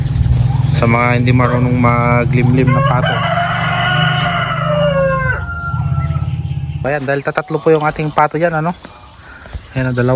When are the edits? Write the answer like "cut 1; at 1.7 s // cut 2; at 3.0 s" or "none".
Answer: cut 1; at 6.8 s